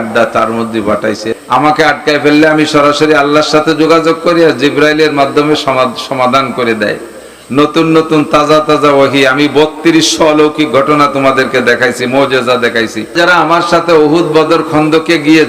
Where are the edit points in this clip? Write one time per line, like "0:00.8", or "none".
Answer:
0:01.3
0:13.1